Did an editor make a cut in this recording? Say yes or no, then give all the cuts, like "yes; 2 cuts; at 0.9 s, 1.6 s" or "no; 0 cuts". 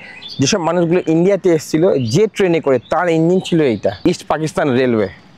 yes; 1 cut; at 4.0 s